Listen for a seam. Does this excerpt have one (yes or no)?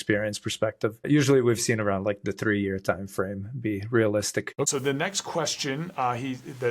yes